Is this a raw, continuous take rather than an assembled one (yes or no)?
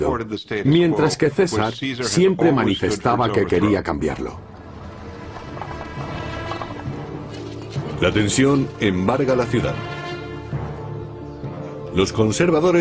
no